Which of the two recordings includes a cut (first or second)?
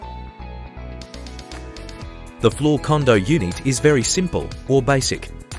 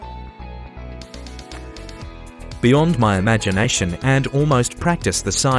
second